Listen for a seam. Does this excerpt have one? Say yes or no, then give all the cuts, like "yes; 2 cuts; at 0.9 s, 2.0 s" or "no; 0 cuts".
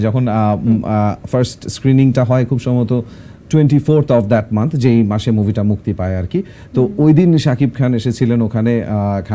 no; 0 cuts